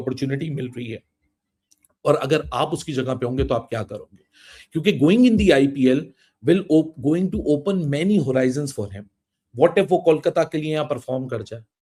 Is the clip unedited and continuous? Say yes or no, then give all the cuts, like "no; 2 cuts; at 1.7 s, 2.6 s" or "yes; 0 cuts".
yes; 0 cuts